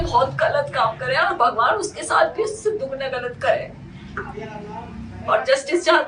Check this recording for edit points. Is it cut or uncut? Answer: uncut